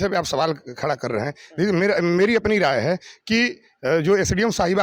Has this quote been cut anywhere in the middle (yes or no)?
no